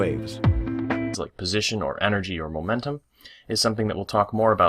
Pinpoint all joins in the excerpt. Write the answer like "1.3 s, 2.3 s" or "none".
none